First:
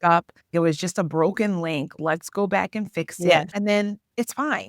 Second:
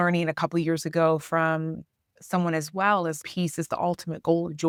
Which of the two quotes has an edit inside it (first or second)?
first